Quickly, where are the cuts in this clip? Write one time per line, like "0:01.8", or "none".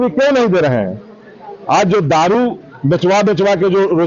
none